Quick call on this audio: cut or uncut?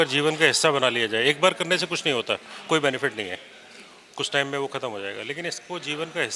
uncut